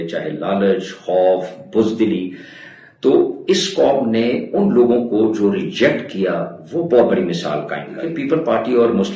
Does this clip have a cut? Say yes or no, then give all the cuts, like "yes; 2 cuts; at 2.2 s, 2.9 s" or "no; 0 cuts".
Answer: yes; 1 cut; at 8.1 s